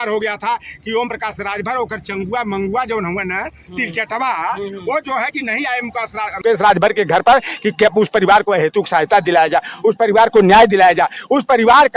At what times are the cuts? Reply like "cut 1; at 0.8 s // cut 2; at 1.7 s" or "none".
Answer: none